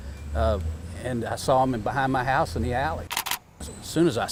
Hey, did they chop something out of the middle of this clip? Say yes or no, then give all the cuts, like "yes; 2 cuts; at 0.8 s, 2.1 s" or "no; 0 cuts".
no; 0 cuts